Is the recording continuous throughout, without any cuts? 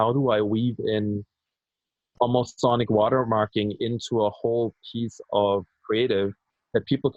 yes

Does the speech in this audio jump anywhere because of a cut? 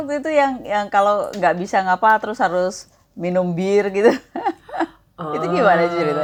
no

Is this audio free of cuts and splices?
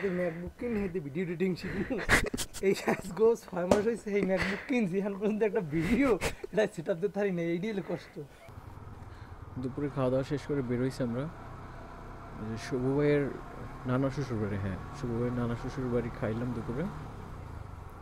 yes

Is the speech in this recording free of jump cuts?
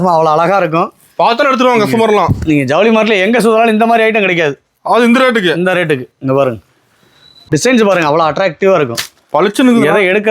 no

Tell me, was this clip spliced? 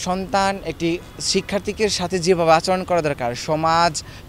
no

